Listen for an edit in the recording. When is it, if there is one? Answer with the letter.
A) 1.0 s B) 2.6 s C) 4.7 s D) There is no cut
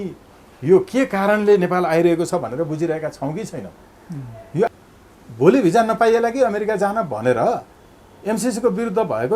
C